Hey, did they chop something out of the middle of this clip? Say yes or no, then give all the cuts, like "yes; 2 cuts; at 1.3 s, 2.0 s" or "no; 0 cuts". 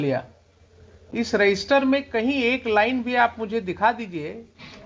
no; 0 cuts